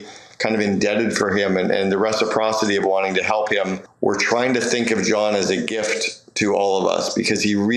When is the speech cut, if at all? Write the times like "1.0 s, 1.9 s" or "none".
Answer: 3.8 s